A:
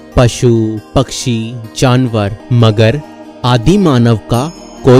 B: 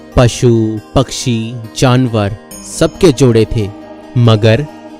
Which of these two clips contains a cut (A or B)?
A